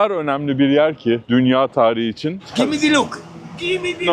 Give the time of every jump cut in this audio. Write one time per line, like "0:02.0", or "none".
0:01.2
0:02.5